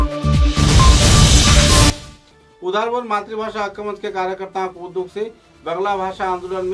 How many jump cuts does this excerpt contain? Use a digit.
1